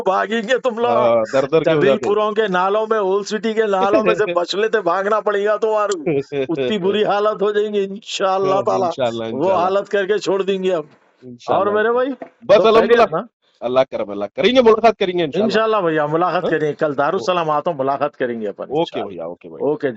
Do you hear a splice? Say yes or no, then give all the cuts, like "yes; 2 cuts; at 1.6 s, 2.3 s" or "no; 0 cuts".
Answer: no; 0 cuts